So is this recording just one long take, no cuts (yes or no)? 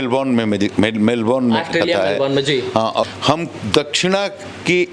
no